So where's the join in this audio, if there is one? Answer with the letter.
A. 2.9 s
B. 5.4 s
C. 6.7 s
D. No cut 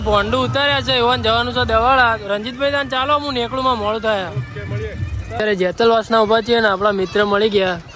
B